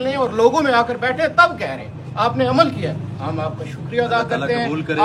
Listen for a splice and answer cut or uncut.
uncut